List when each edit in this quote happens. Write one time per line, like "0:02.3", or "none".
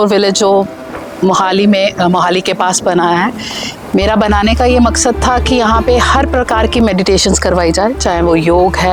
none